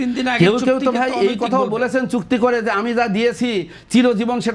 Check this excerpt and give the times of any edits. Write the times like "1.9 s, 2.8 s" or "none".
none